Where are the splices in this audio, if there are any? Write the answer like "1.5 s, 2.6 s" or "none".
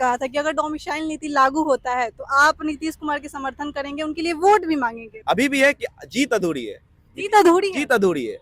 5.1 s